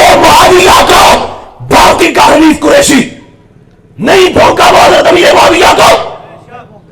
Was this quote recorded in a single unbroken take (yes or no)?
no